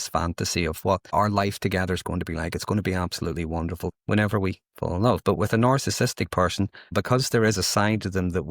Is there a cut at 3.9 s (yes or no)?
yes